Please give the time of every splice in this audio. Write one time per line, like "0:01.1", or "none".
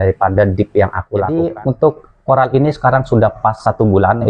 0:01.3

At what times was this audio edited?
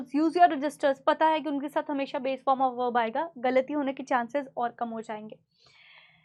none

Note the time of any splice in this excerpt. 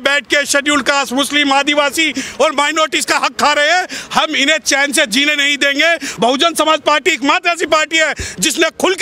0:06.1

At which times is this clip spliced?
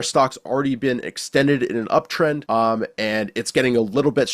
0:02.4

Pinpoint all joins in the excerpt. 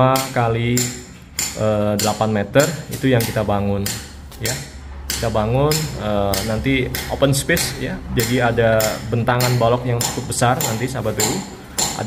none

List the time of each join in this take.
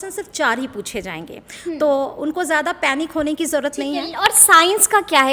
none

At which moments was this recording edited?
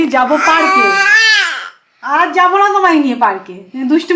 none

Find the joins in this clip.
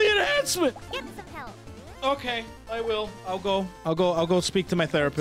0:00.8
0:03.7

